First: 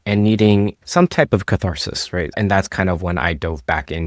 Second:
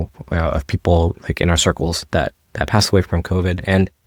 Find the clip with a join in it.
first; 1 cut; at 2.4 s

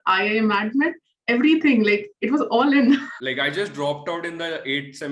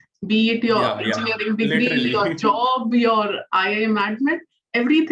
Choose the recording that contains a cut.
first; 1 cut; at 3.1 s

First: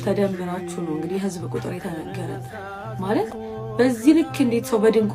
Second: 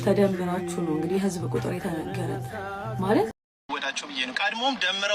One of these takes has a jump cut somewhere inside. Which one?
second; 1 cut; at 3.3 s

